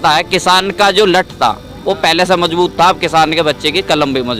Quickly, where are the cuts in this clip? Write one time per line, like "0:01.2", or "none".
none